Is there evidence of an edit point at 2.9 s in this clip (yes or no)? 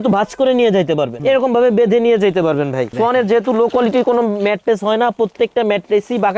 yes